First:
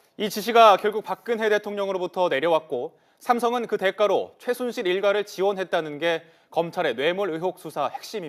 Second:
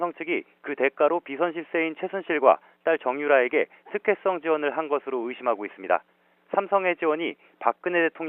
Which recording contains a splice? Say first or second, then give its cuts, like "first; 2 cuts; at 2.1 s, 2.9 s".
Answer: second; 1 cut; at 3.1 s